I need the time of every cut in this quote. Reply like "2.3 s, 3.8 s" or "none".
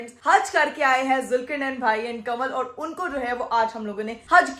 none

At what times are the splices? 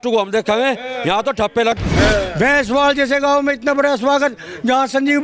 1.7 s

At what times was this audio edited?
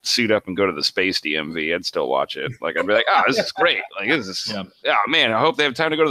none

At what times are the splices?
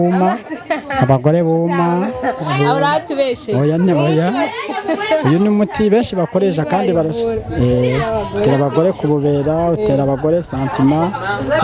none

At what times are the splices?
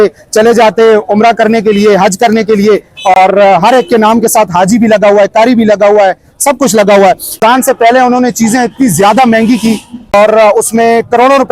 7.4 s, 10.1 s

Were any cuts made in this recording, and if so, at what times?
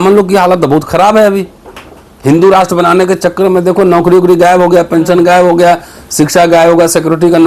none

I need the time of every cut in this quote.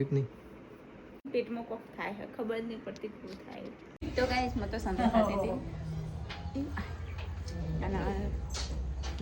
1.3 s, 3.9 s

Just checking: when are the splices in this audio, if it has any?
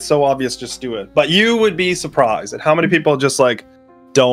none

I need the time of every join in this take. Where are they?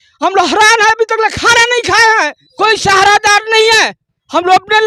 2.4 s

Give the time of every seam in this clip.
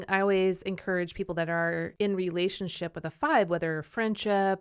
1.9 s

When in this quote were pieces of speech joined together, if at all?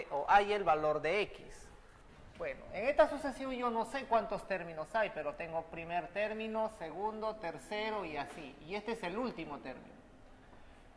9.1 s

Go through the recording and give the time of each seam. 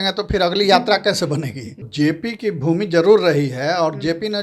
1.9 s

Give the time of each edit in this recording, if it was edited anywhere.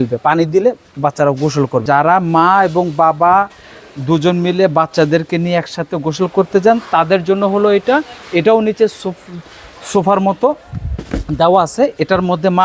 1.8 s

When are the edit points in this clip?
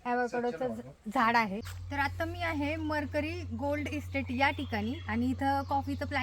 1.7 s

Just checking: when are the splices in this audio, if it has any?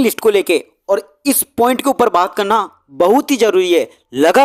none

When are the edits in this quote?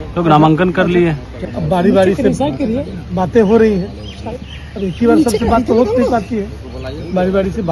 1.3 s

